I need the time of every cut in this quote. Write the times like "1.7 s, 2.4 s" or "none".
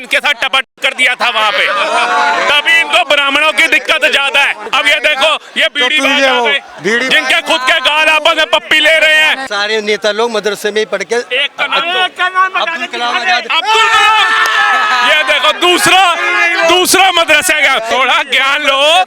4.6 s, 9.5 s, 17.9 s